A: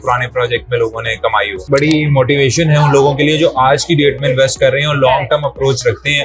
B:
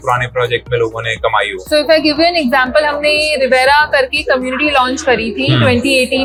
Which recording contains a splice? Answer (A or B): A